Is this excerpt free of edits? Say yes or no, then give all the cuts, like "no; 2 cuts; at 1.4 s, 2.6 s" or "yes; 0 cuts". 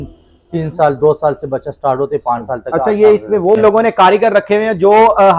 no; 1 cut; at 3.6 s